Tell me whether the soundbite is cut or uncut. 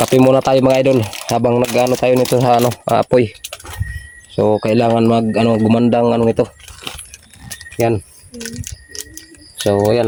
uncut